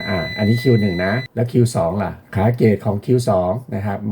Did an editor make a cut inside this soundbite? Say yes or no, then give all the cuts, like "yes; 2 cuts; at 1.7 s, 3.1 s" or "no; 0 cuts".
yes; 2 cuts; at 1.3 s, 2.2 s